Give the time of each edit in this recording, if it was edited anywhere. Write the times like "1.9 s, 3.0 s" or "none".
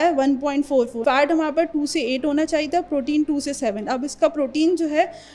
0.9 s